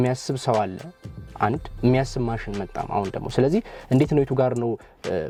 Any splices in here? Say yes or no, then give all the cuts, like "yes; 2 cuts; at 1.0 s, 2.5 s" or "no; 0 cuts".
no; 0 cuts